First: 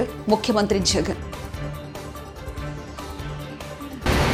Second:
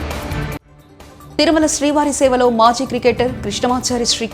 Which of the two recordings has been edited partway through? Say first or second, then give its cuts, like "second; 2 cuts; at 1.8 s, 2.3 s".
second; 1 cut; at 1.2 s